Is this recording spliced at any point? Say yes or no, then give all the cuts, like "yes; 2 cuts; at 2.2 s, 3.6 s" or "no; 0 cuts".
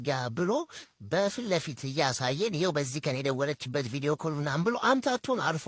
no; 0 cuts